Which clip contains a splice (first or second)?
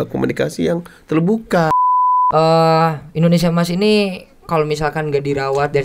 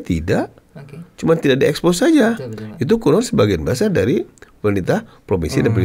first